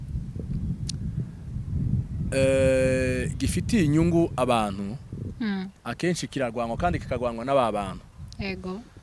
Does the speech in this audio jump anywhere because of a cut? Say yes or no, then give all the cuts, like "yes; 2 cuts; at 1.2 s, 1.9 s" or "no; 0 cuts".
no; 0 cuts